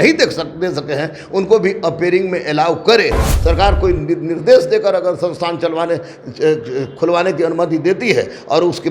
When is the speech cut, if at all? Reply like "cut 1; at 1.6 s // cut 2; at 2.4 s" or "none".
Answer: cut 1; at 3.3 s